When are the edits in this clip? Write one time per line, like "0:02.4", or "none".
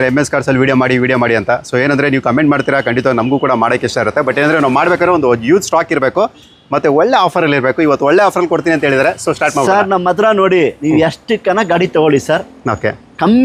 none